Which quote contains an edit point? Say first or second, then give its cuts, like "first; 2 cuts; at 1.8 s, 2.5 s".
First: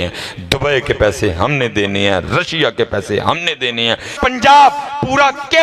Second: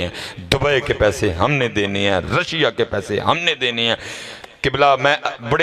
first; 1 cut; at 4.2 s